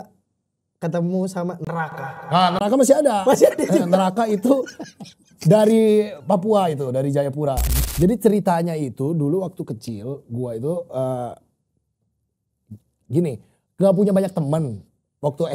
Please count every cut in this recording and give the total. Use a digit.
1